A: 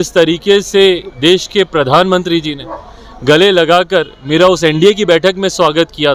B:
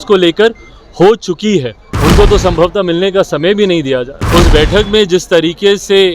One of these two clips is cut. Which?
B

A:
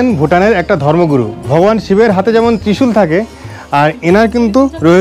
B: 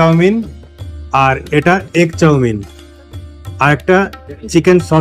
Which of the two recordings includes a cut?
A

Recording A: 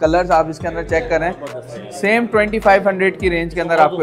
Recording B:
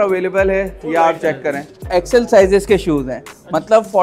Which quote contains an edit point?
B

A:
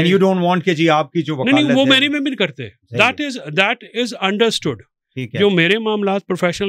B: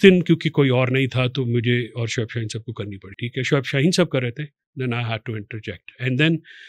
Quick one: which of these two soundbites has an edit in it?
B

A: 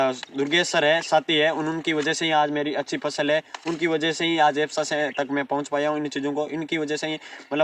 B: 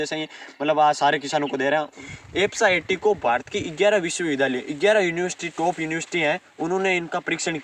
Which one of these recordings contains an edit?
B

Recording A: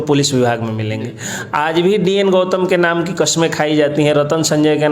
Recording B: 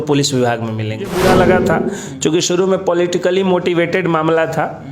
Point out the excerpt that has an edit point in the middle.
B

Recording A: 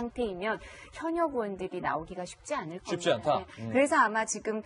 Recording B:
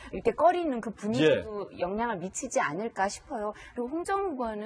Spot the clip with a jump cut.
A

